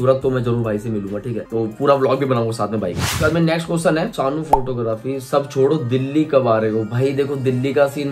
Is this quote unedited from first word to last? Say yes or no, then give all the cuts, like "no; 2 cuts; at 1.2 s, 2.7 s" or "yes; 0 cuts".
yes; 0 cuts